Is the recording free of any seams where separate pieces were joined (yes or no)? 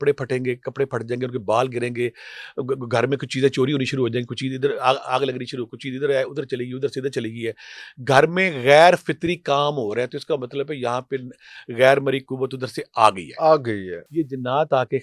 no